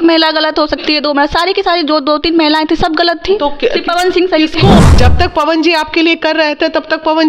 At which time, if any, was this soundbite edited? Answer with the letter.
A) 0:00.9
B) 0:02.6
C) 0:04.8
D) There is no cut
C